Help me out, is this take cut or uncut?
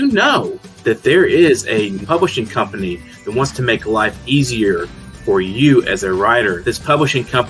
cut